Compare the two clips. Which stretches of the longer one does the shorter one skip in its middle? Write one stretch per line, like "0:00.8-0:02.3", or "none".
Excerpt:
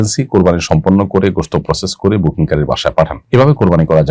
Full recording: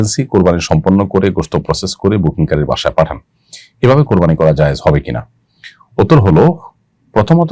0:03.2-0:03.7